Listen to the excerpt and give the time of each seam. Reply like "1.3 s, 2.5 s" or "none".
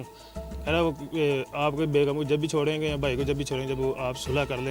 none